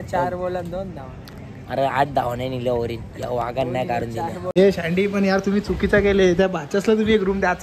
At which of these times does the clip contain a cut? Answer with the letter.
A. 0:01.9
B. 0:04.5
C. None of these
B